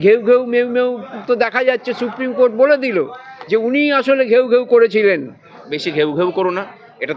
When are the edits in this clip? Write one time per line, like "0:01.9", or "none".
0:05.6